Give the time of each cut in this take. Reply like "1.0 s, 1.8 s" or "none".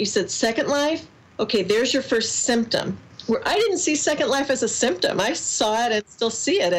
none